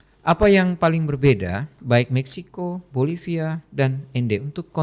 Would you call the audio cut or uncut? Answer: uncut